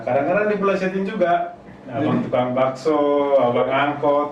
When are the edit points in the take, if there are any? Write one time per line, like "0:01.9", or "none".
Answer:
none

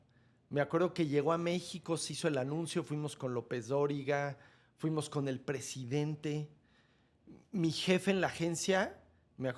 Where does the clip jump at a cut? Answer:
none

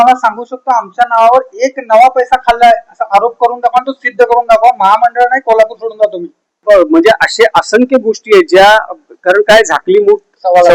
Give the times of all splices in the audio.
0:06.6

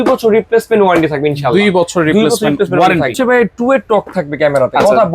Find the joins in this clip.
0:03.2

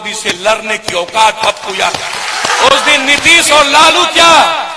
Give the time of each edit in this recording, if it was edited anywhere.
0:02.5

